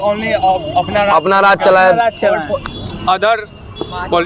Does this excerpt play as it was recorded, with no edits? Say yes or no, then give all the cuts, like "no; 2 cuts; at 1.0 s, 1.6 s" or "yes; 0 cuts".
yes; 0 cuts